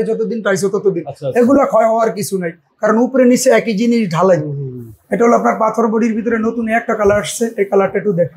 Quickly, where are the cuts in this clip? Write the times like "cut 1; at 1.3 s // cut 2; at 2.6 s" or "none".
none